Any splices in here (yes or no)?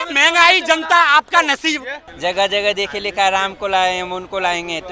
yes